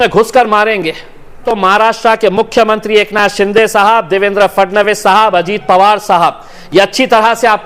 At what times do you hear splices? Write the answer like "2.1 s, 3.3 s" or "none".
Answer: 1.4 s

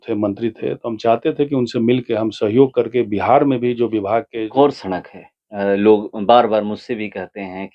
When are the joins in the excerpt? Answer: 4.5 s

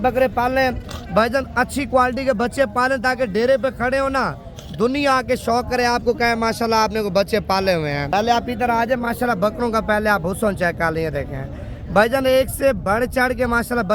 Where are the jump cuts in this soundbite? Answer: 8.0 s

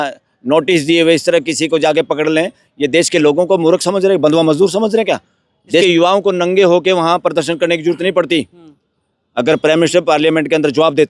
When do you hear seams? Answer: 5.8 s

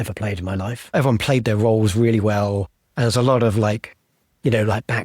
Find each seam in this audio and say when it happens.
0.9 s

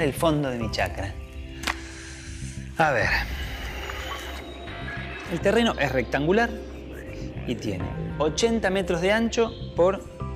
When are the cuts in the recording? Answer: 4.7 s

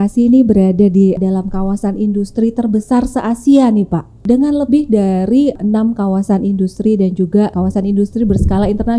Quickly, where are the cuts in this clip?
1.2 s, 4.2 s, 5.6 s, 7.5 s

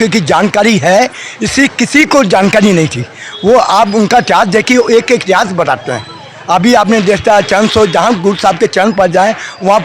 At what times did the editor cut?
none

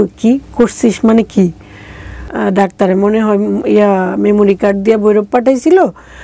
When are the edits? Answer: 2.3 s

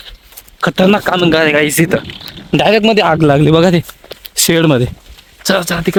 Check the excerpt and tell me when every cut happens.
none

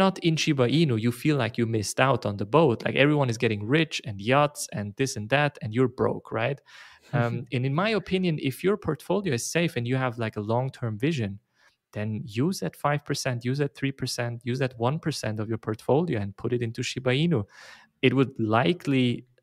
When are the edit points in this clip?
none

